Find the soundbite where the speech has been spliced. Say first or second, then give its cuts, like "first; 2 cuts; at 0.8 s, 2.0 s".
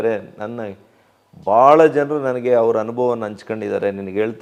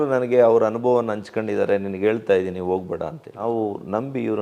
second; 1 cut; at 3.3 s